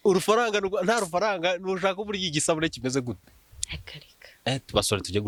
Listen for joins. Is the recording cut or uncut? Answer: uncut